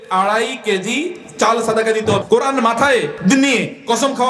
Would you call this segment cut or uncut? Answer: cut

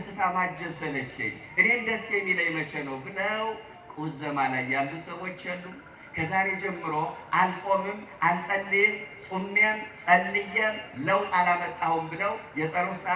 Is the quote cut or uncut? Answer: uncut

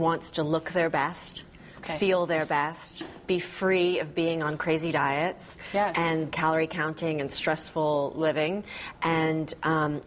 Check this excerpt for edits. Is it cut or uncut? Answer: uncut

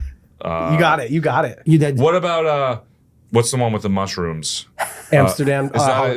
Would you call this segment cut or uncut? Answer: cut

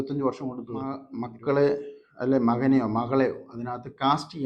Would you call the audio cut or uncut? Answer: cut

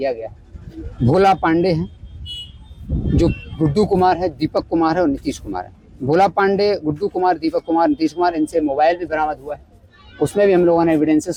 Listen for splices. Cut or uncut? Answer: uncut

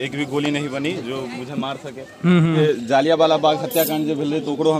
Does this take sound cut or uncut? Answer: cut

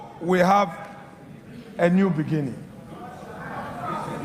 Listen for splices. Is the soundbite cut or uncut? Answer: uncut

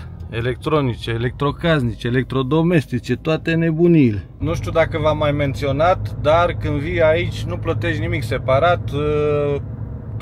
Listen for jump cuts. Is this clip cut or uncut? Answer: uncut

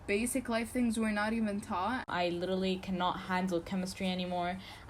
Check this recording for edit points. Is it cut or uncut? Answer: cut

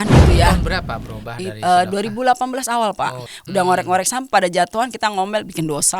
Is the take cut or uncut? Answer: cut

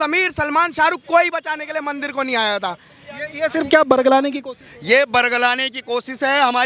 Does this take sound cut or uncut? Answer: uncut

